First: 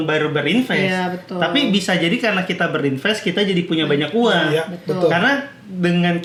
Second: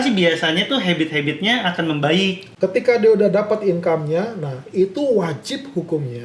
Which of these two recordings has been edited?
second; 1 cut; at 2.5 s

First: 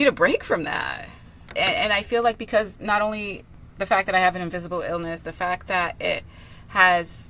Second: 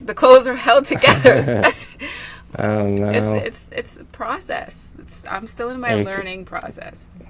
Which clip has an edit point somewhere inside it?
first; 1 cut; at 1.5 s

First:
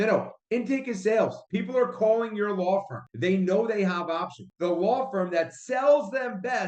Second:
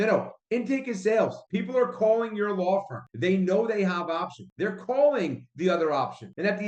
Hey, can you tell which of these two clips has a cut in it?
first; 1 cut; at 4.5 s

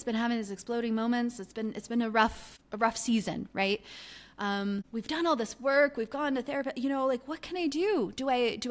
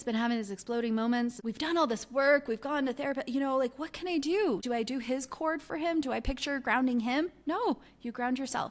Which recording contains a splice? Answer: second; 2 cuts; at 1.4 s, 4.6 s

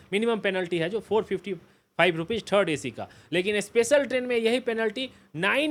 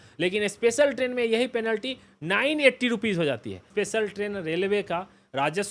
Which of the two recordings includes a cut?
second; 1 cut; at 3.6 s

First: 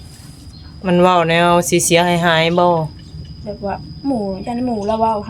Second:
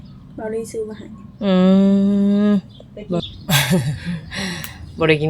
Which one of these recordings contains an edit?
second; 1 cut; at 3.2 s

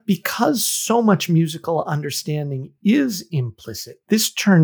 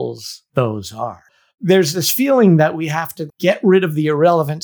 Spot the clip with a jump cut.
second; 2 cuts; at 1.3 s, 3.2 s

